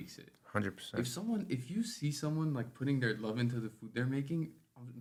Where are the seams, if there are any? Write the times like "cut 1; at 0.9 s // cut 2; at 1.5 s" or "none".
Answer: none